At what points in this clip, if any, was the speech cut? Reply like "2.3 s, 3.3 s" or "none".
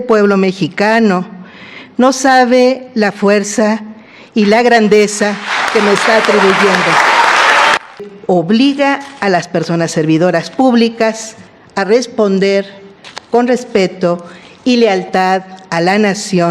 8.1 s